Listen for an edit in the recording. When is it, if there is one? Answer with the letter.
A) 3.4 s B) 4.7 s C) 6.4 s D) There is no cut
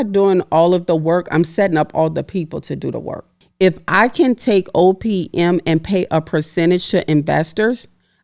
A